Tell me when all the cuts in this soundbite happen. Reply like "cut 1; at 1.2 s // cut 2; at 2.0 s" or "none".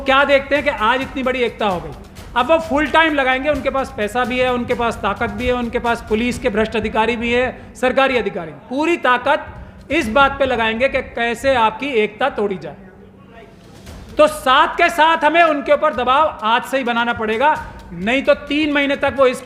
none